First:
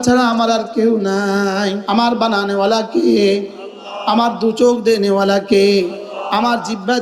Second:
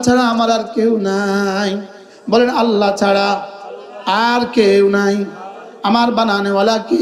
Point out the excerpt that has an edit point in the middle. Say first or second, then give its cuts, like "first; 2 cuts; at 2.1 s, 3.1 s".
first; 1 cut; at 1.8 s